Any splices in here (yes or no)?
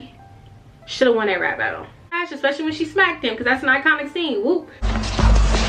yes